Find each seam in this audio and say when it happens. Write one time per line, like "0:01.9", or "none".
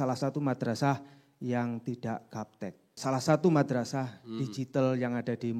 0:03.0